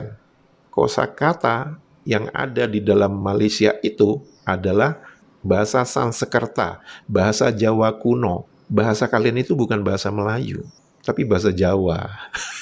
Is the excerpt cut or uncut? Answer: cut